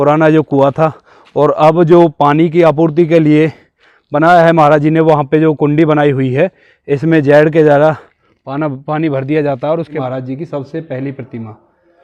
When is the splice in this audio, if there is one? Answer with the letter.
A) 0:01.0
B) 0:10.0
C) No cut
B